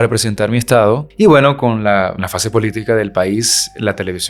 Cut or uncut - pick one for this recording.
cut